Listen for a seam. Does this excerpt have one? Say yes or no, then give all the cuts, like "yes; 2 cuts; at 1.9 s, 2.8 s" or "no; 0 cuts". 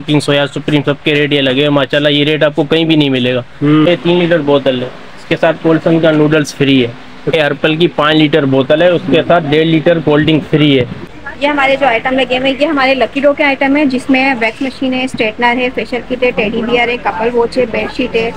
yes; 3 cuts; at 3.9 s, 7.3 s, 11.0 s